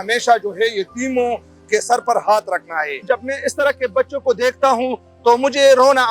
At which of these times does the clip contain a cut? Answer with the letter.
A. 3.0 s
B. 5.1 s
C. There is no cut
A